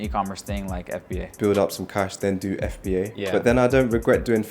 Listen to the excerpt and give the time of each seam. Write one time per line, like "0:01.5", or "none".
0:01.3
0:03.3